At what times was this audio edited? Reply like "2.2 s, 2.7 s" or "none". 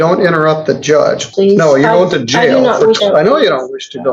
1.3 s, 3.0 s